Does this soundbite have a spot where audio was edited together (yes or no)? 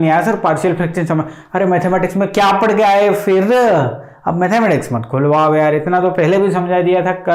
no